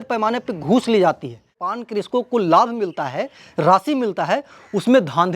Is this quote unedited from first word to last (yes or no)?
no